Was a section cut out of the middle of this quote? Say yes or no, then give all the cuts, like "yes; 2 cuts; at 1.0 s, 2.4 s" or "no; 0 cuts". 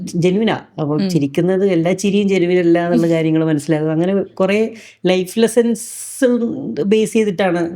no; 0 cuts